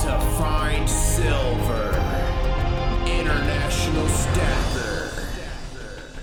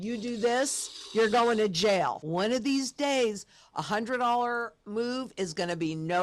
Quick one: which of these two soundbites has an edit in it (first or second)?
second